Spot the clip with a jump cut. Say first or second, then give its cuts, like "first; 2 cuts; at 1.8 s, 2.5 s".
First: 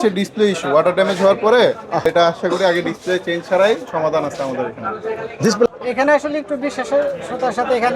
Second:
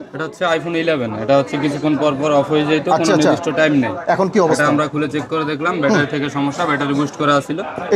first; 2 cuts; at 2.1 s, 5.7 s